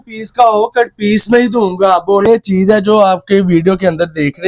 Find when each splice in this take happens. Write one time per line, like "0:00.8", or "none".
0:02.3